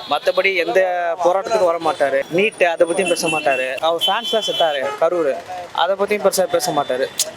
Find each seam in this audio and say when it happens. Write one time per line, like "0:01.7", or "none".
0:02.2
0:03.8